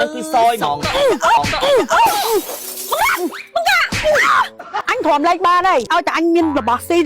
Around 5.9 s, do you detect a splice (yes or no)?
yes